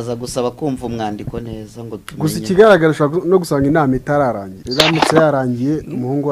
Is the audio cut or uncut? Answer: cut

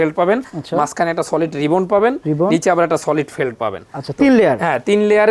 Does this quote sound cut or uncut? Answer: uncut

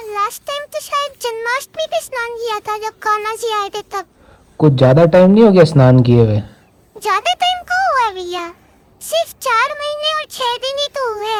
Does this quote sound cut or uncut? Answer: uncut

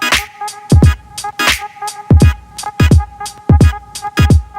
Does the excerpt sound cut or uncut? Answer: cut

